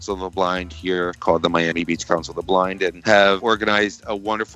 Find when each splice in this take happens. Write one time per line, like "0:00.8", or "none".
0:01.1
0:03.4